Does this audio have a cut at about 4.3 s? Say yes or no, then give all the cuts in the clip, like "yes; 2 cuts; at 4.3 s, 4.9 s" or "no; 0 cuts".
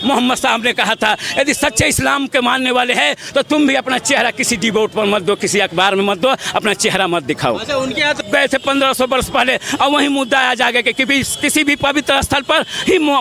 no; 1 cut; at 8.2 s